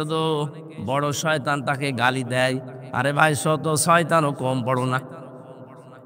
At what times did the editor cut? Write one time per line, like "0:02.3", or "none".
none